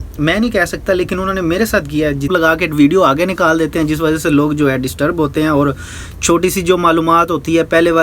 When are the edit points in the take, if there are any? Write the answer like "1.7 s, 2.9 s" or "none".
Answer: 2.3 s